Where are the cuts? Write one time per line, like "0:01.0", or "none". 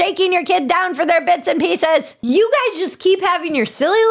0:02.1